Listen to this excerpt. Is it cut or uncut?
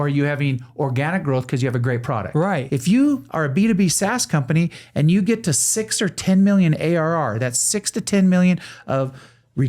cut